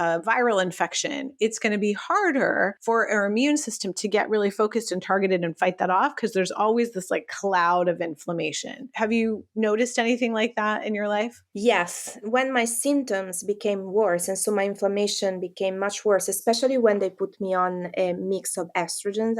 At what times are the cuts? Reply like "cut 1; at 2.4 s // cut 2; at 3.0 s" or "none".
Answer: cut 1; at 2.8 s // cut 2; at 8.9 s // cut 3; at 12.2 s